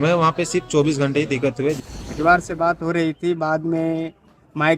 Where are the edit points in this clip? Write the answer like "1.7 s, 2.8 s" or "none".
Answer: 1.8 s